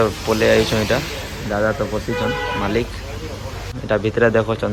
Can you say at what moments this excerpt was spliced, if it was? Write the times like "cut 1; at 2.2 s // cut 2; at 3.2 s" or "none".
cut 1; at 3.7 s